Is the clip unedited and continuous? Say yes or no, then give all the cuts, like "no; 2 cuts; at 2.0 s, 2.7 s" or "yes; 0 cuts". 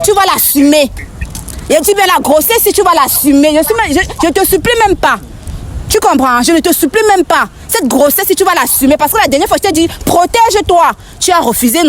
yes; 0 cuts